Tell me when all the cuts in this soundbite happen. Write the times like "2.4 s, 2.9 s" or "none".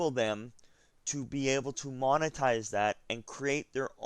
none